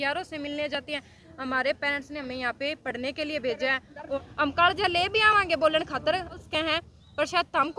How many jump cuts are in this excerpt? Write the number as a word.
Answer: two